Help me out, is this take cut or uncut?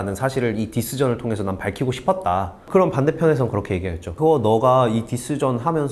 cut